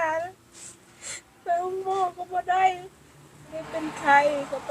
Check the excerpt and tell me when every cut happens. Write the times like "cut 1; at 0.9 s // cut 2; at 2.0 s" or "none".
cut 1; at 3.6 s